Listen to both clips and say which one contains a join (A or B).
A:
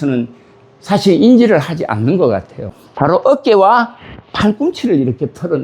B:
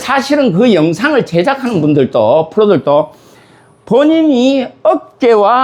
A